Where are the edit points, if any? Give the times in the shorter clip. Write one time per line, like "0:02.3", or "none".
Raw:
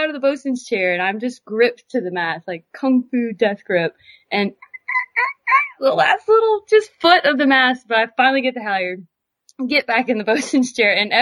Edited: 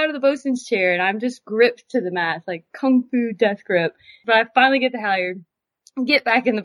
0:04.2

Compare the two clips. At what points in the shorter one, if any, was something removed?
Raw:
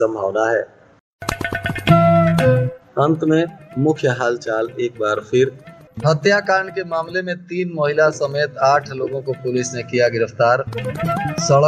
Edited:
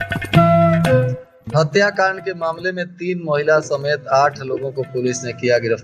0:01.2

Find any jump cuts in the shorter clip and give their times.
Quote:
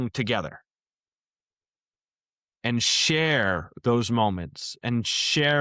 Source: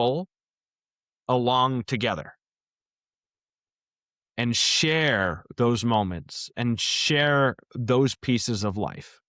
none

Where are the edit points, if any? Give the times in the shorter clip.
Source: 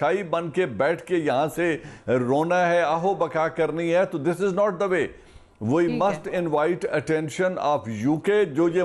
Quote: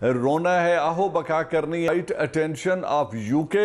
0:01.9

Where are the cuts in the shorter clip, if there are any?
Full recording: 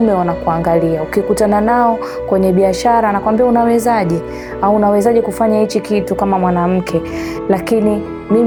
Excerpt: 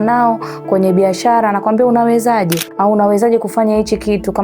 0:02.6

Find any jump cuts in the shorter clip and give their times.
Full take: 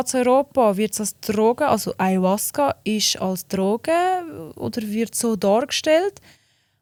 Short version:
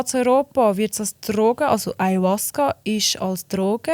none

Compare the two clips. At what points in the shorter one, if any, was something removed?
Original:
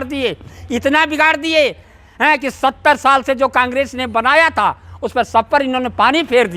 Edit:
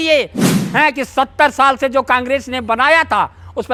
none

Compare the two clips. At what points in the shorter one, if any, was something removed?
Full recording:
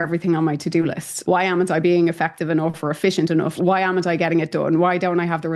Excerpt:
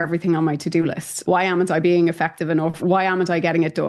0:02.8

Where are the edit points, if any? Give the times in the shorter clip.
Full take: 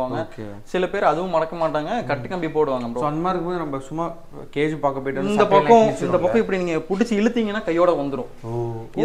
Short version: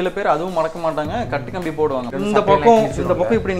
0:02.1

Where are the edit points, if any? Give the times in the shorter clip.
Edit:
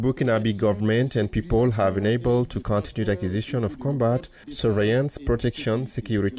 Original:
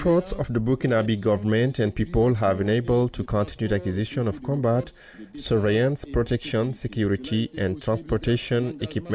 0:04.4

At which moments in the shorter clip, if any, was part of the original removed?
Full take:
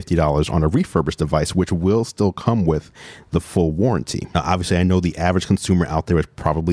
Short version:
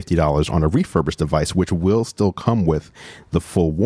none

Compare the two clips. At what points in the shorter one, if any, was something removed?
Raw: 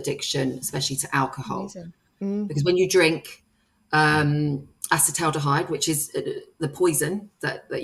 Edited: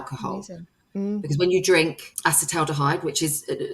0:02.1

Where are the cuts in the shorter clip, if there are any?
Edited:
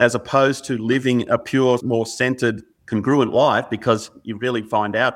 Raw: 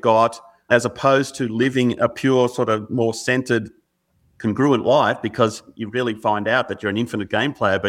0:01.8
0:02.7

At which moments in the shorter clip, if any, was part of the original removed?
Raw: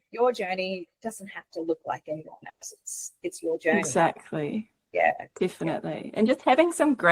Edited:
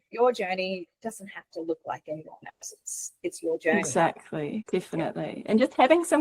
0:04.6

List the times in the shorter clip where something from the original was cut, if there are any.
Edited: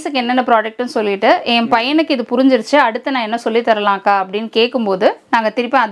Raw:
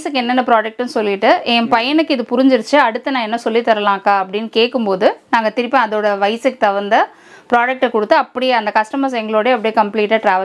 none

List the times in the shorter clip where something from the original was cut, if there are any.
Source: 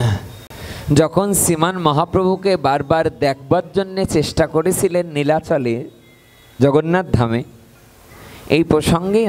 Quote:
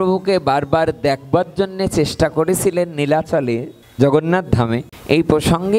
0:03.8
0:04.9

